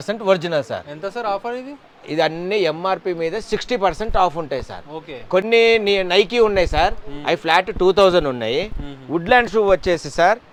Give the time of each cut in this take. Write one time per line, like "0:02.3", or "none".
none